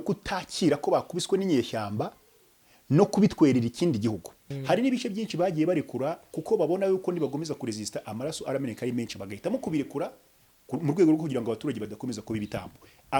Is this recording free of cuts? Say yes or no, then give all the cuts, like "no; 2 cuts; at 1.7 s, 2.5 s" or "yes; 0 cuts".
no; 1 cut; at 4.5 s